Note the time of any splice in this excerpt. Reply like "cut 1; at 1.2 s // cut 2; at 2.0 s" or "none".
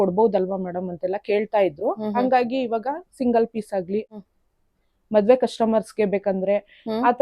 cut 1; at 4.1 s